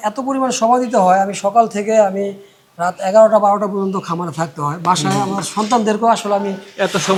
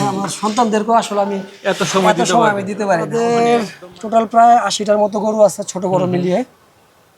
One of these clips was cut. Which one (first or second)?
second